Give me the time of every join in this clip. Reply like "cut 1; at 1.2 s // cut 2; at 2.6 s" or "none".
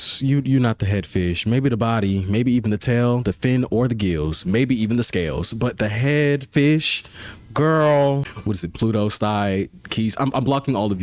cut 1; at 8.3 s

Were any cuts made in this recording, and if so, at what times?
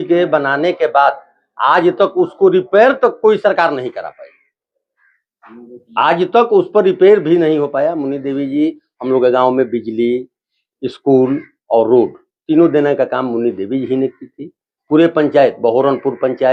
none

